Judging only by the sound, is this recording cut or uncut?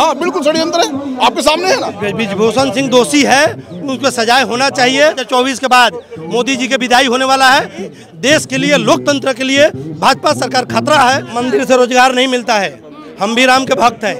cut